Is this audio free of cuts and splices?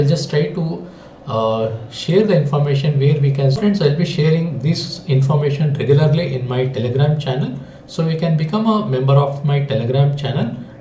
no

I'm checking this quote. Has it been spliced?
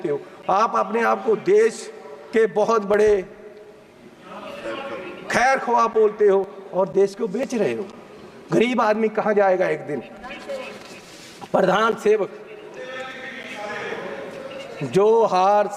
no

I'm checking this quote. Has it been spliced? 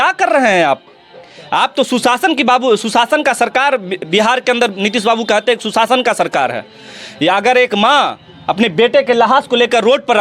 no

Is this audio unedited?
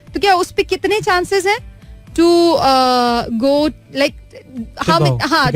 yes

